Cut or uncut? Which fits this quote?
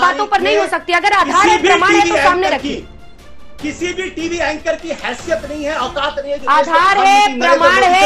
uncut